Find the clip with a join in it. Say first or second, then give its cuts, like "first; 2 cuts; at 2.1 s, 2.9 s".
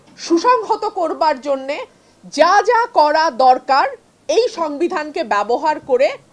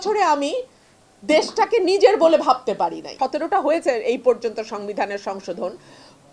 second; 1 cut; at 3.0 s